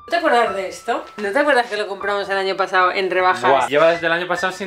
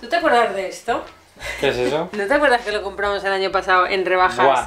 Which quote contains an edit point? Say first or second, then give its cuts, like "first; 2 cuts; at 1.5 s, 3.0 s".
first; 2 cuts; at 1.2 s, 3.7 s